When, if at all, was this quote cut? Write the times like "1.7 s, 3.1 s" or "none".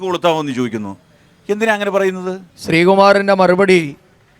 2.5 s